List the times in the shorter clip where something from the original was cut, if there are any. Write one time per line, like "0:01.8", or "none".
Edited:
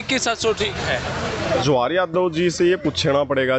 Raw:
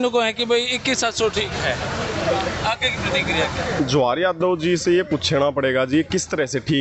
0:01.6